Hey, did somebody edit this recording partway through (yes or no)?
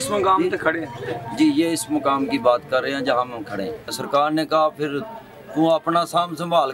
yes